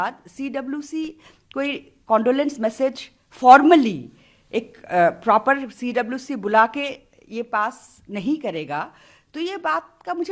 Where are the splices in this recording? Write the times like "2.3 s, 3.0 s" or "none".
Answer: none

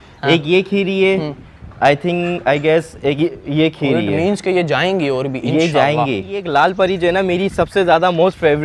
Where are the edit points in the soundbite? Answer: 6.4 s

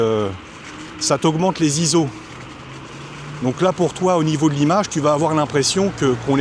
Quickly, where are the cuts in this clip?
none

